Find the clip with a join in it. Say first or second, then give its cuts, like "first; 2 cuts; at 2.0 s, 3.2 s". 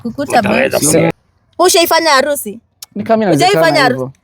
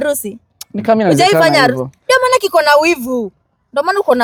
first; 1 cut; at 1.1 s